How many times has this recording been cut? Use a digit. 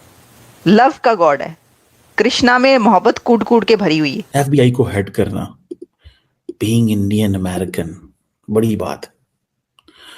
1